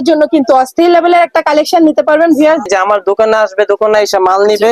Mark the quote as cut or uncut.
cut